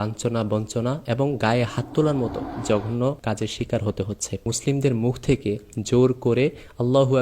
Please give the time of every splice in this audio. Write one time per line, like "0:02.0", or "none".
0:02.5
0:03.2
0:04.5